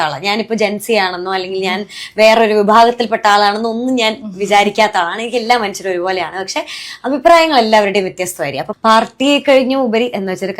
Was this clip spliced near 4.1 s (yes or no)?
no